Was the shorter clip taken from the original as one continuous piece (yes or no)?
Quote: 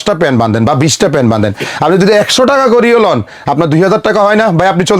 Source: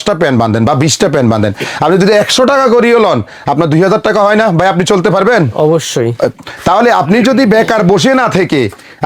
yes